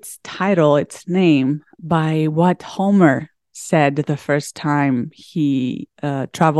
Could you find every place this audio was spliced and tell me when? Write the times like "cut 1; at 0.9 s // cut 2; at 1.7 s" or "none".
cut 1; at 1.7 s